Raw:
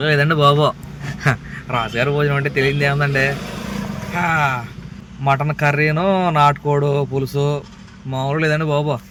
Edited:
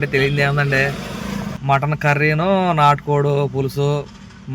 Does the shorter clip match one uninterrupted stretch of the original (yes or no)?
no